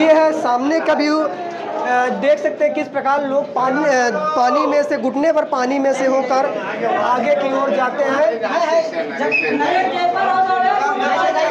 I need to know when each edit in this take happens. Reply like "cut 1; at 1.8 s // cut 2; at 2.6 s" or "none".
none